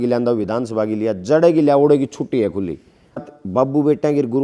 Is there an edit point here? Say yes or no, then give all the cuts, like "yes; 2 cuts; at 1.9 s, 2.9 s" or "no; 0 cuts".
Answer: yes; 1 cut; at 3.2 s